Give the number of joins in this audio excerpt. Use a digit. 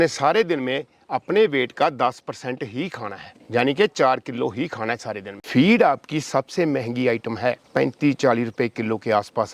1